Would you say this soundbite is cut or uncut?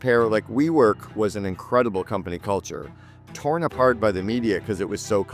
uncut